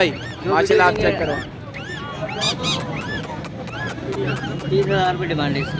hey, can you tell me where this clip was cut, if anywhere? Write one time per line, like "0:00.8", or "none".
none